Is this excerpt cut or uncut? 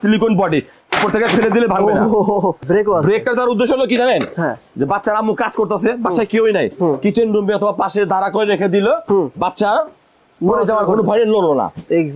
cut